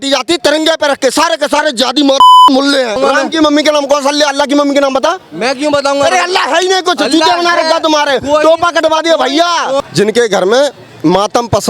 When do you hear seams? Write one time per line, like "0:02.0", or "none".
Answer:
0:03.0
0:09.8